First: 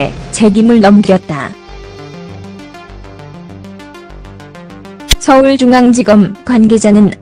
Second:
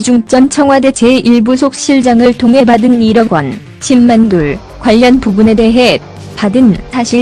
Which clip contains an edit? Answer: second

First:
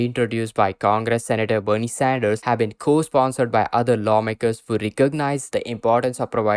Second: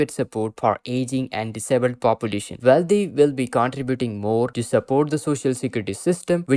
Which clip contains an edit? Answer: second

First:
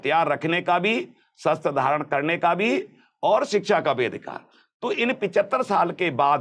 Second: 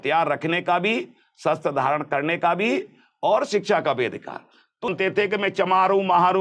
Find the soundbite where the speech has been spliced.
second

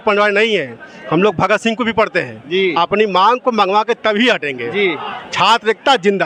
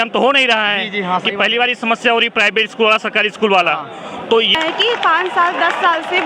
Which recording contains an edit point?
second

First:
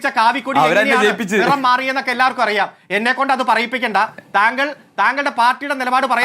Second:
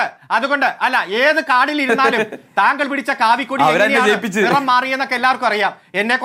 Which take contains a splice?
first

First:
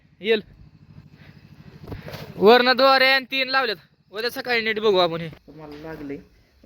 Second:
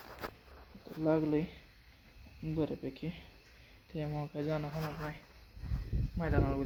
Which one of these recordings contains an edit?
first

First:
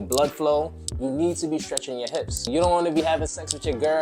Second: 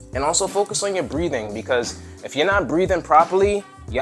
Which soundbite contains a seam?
first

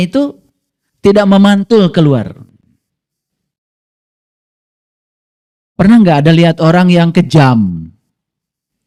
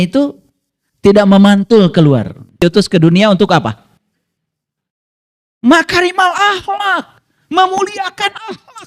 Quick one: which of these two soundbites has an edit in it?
second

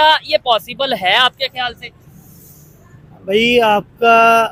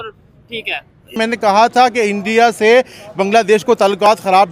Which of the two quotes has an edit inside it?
second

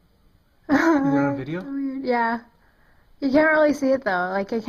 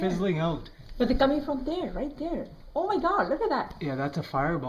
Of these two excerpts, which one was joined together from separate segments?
second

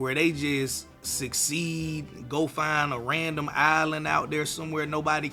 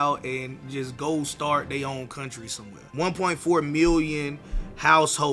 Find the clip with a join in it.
second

